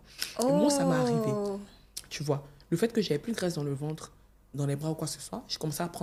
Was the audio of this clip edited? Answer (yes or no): no